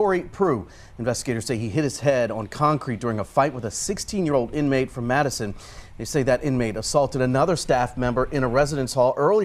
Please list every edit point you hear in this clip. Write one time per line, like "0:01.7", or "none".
none